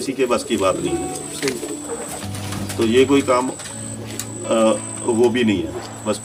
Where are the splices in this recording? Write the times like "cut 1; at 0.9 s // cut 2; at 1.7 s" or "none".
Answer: none